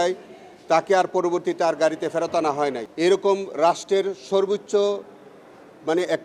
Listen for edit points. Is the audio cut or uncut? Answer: cut